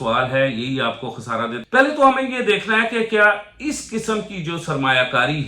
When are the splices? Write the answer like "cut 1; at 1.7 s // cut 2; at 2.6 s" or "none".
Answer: cut 1; at 1.6 s